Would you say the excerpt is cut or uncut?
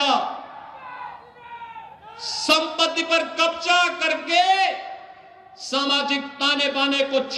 uncut